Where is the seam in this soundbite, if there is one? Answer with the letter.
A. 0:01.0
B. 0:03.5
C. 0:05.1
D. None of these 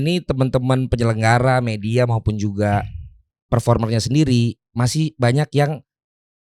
D